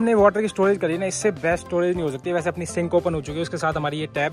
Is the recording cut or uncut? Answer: uncut